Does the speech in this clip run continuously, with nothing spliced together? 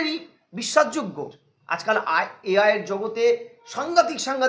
no; 1 cut; at 1.3 s

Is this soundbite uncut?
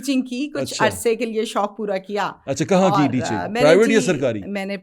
yes; 0 cuts

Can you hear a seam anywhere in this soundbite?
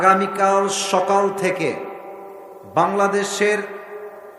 no; 0 cuts

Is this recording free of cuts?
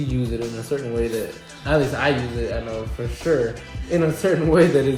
yes; 0 cuts

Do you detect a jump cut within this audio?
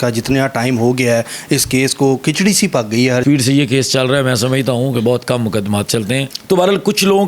yes; 2 cuts; at 3.2 s, 6.3 s

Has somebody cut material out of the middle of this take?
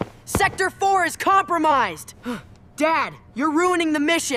no; 0 cuts

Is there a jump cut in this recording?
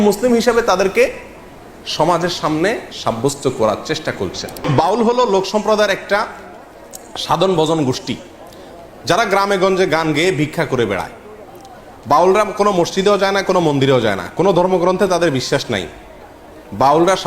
yes; 1 cut; at 4.6 s

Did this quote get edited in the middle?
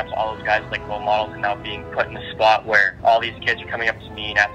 yes; 1 cut; at 2.9 s

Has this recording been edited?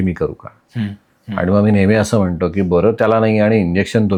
no; 0 cuts

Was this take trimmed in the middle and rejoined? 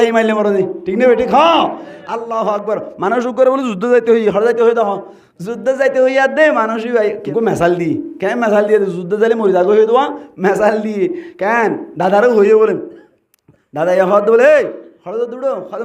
yes; 1 cut; at 7.2 s

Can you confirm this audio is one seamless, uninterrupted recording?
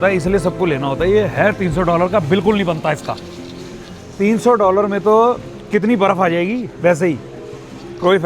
yes; 0 cuts

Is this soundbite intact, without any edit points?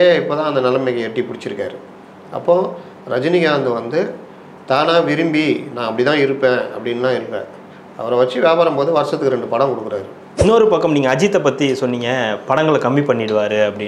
no; 1 cut; at 10.3 s

